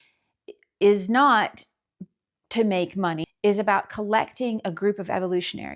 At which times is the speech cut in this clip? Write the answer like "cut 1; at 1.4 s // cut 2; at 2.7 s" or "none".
cut 1; at 3.2 s